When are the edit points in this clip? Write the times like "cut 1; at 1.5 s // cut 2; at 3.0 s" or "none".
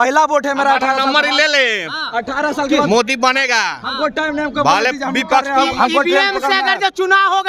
none